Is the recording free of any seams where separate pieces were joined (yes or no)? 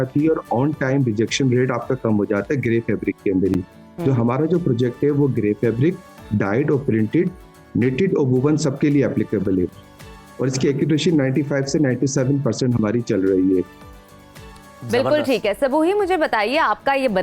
yes